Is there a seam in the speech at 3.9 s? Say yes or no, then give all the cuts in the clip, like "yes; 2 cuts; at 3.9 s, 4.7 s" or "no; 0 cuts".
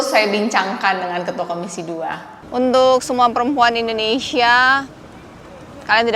no; 1 cut; at 2.3 s